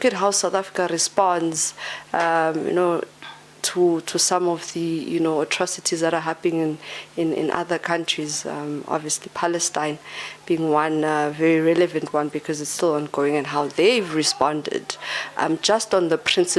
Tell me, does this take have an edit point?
no; 0 cuts

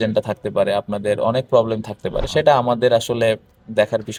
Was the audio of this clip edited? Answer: no; 0 cuts

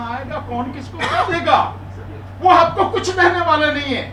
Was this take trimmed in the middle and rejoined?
no; 0 cuts

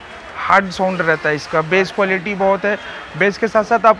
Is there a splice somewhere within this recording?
no; 0 cuts

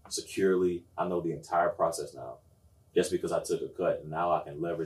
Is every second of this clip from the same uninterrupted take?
yes; 0 cuts

